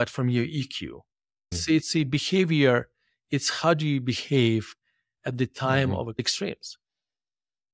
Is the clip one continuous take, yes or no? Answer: no